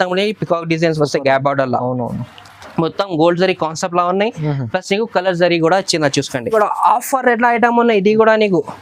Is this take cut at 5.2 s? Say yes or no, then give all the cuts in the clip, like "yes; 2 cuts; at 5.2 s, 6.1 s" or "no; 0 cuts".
no; 1 cut; at 6.5 s